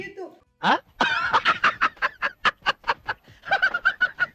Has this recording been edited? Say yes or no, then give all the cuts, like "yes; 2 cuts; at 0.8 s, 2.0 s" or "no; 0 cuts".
no; 0 cuts